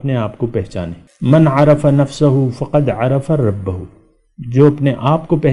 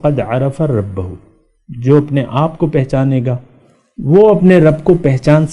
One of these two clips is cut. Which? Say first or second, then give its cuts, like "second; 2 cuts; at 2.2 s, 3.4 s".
first; 1 cut; at 1.0 s